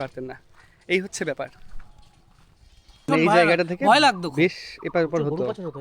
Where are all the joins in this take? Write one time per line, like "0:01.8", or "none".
0:03.1